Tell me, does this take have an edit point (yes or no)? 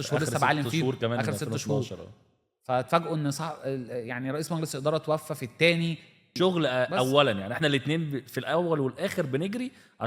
yes